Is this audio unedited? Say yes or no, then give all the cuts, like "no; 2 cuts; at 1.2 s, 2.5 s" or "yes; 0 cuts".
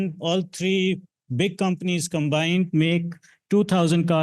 yes; 0 cuts